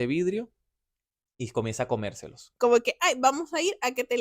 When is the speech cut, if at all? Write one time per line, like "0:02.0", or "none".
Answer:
0:02.4